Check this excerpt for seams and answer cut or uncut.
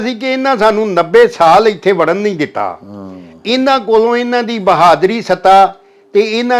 uncut